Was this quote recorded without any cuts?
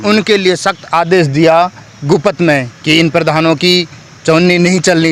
yes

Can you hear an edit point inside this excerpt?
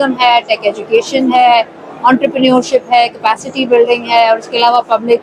no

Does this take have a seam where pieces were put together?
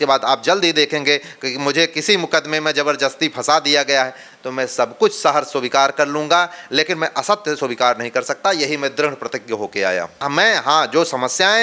yes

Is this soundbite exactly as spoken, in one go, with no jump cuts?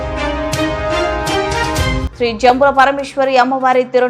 no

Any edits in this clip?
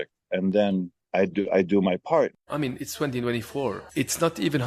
yes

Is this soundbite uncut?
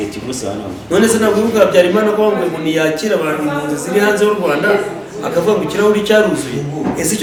yes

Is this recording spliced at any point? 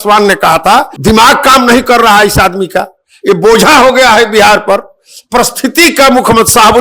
yes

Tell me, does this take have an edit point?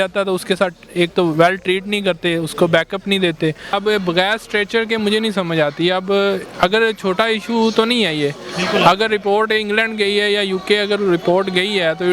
yes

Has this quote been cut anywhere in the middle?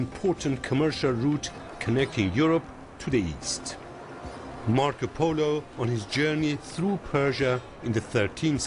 yes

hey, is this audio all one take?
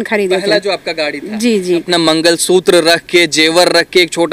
no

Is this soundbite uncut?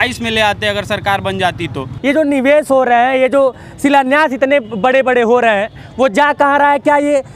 no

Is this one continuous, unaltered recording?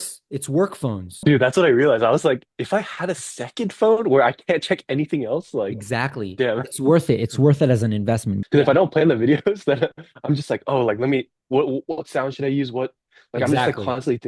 no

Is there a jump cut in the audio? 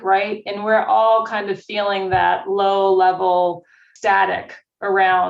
yes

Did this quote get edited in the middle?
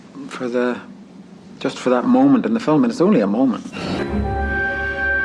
yes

